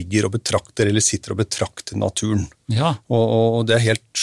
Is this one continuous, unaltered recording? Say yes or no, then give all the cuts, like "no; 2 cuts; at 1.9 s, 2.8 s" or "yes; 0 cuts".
yes; 0 cuts